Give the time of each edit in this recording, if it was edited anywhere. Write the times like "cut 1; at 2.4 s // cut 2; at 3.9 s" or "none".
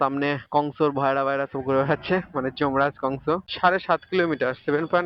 cut 1; at 3.5 s